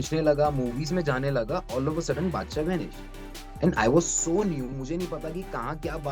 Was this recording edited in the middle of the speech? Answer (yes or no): no